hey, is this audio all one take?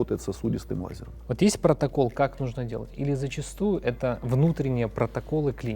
yes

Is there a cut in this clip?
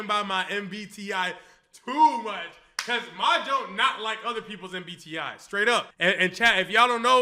no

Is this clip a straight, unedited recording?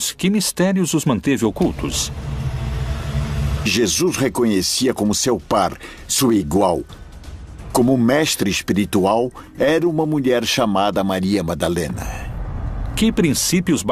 yes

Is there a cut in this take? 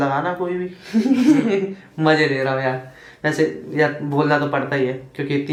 no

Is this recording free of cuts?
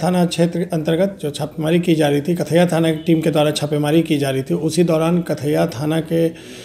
yes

